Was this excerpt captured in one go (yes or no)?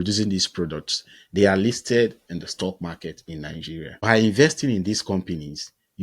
no